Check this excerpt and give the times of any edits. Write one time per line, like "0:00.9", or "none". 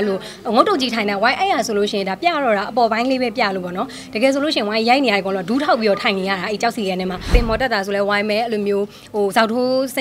0:07.3